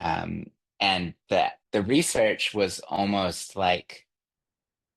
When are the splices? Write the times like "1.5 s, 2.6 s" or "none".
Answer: 1.6 s

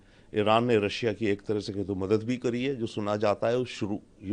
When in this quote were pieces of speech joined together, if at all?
none

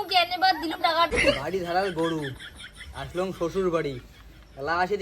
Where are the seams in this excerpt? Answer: 1.1 s

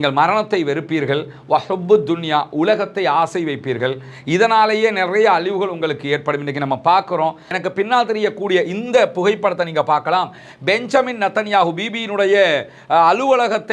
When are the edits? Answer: 7.6 s

